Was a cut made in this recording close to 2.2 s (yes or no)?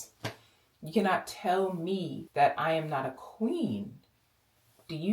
yes